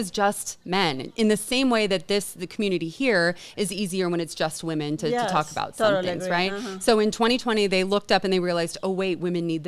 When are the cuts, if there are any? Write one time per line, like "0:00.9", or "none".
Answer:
none